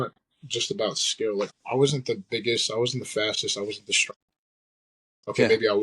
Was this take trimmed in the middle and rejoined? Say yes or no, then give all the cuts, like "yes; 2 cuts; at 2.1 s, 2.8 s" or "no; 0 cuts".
yes; 1 cut; at 1.5 s